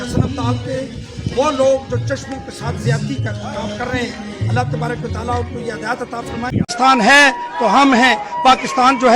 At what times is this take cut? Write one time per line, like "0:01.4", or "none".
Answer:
0:06.5